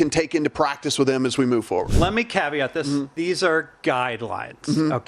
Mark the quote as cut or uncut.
cut